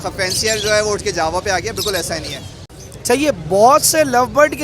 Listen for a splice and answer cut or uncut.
cut